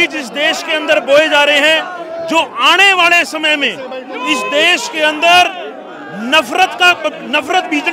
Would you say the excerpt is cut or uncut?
uncut